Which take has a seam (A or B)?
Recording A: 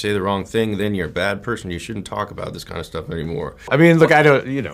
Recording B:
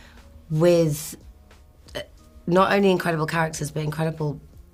A